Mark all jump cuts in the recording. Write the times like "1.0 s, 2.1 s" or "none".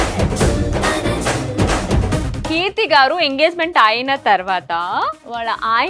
2.4 s